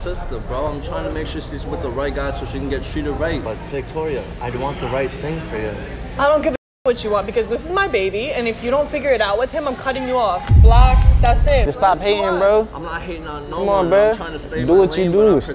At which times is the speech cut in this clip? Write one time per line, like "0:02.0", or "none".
0:03.4
0:11.7